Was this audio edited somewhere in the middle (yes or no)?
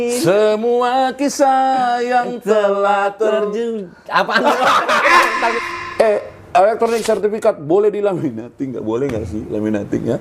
yes